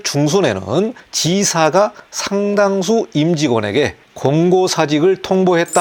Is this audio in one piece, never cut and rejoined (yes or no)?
yes